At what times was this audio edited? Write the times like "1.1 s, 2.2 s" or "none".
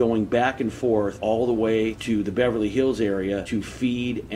1.1 s, 2.0 s, 3.4 s